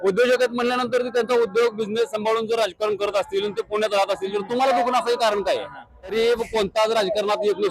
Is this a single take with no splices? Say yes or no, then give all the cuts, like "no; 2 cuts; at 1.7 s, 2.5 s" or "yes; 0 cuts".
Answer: no; 1 cut; at 6.1 s